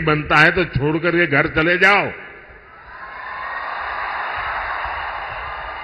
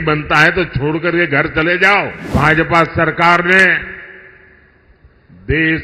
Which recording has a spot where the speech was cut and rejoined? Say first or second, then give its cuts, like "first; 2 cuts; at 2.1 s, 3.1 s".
second; 1 cut; at 2.3 s